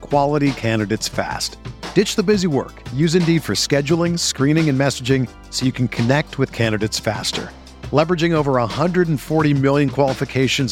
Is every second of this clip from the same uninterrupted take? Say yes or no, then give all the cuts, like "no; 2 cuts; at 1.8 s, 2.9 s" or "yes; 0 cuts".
yes; 0 cuts